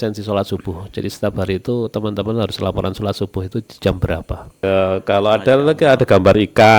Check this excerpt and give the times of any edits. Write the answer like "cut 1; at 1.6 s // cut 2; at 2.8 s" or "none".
cut 1; at 4.5 s